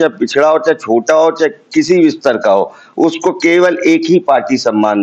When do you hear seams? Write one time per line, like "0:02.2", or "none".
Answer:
none